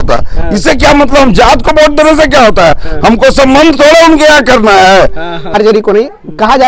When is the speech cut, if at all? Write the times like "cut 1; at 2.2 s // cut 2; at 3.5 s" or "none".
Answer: cut 1; at 5.5 s

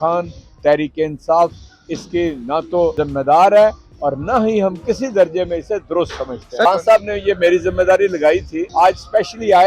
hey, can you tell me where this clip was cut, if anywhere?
cut 1; at 2.9 s // cut 2; at 6.6 s // cut 3; at 8.6 s

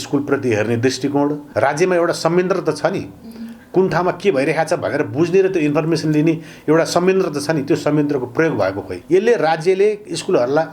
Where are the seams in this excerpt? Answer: cut 1; at 1.4 s // cut 2; at 8.9 s

